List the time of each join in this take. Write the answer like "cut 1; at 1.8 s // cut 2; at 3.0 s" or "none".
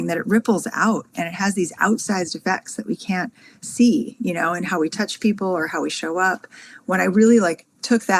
none